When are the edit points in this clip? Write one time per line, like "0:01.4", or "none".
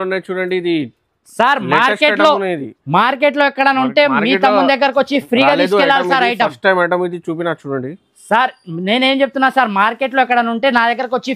none